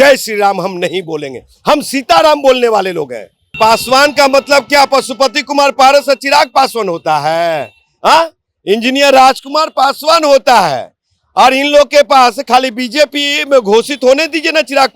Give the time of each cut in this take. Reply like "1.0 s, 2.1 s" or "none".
3.5 s